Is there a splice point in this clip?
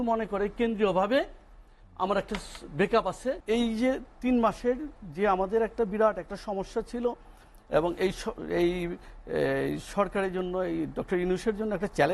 yes; 1 cut; at 3.4 s

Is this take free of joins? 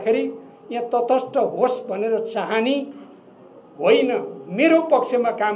no; 1 cut; at 2.8 s

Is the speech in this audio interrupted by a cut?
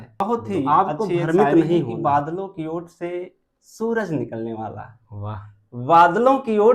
yes; 1 cut; at 1.9 s

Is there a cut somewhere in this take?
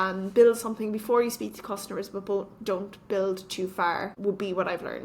yes; 1 cut; at 4.1 s

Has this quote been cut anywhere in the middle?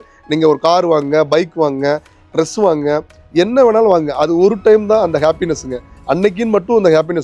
no; 0 cuts

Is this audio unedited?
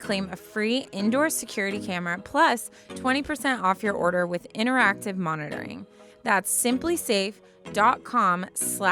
yes; 0 cuts

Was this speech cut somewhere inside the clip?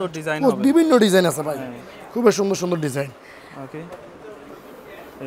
no; 0 cuts

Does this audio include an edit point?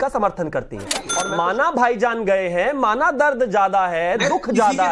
yes; 1 cut; at 1.1 s

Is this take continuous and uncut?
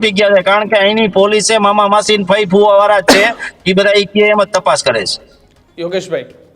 yes; 0 cuts

